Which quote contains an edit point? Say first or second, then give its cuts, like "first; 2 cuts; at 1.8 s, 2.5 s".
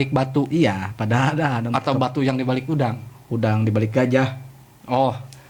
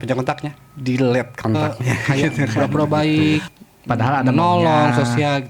second; 1 cut; at 2.5 s